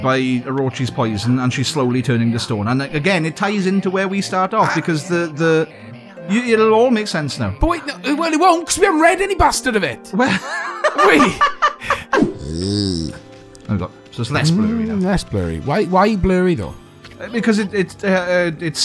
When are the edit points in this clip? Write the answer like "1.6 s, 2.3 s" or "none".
12.4 s